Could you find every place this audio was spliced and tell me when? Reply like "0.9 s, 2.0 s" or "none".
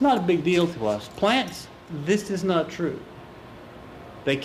none